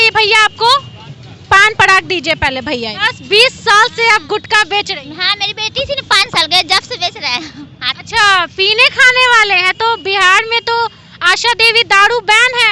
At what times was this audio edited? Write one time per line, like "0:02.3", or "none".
0:03.0
0:07.8